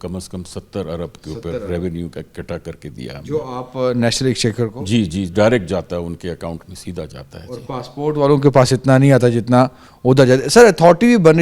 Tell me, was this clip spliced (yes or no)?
no